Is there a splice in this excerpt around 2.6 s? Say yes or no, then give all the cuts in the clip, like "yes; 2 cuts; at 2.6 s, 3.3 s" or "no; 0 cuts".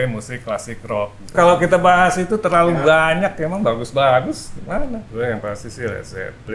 no; 2 cuts; at 1.3 s, 5.0 s